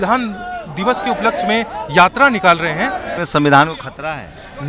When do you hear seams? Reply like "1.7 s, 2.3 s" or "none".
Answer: 3.1 s